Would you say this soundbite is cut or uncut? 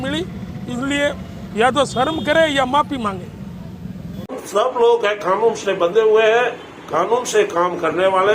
cut